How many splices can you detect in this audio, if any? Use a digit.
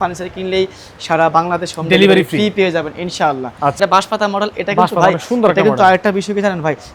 1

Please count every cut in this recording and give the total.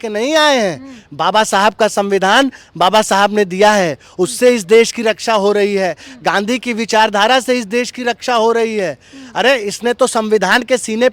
0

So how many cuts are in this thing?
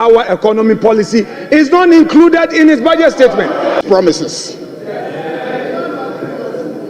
1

